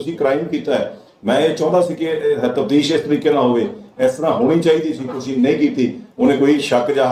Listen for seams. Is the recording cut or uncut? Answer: uncut